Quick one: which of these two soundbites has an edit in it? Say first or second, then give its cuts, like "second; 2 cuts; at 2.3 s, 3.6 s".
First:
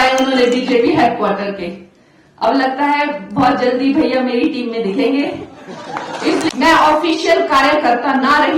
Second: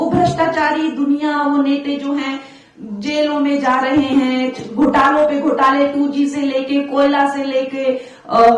first; 1 cut; at 6.5 s